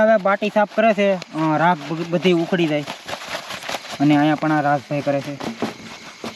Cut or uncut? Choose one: uncut